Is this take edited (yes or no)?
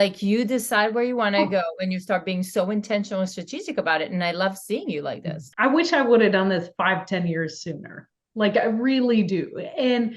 yes